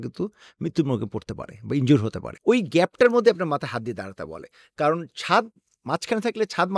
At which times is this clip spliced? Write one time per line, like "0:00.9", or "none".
0:02.3